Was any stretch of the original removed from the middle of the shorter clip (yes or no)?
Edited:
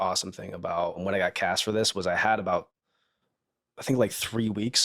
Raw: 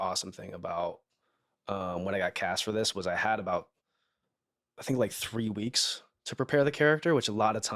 yes